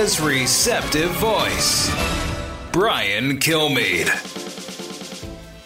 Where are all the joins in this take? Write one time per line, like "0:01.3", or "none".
0:04.2